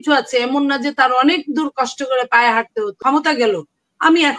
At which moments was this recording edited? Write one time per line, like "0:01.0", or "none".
0:03.0